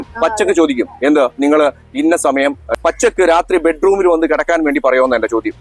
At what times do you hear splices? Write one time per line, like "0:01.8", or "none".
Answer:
0:02.6